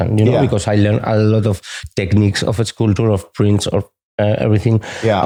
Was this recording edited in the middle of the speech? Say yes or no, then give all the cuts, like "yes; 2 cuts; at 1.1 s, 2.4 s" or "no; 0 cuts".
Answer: no; 0 cuts